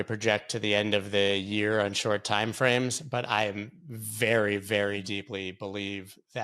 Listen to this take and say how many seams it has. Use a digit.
0